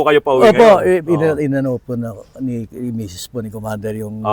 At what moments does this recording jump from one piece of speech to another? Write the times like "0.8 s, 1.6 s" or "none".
none